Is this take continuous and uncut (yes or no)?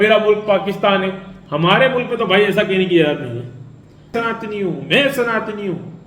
no